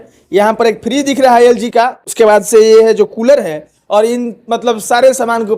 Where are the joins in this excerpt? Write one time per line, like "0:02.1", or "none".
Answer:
none